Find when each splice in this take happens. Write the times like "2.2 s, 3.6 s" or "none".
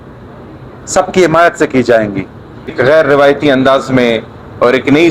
2.7 s